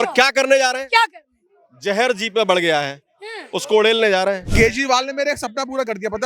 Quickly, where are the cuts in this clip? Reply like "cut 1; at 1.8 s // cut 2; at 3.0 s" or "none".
cut 1; at 4.5 s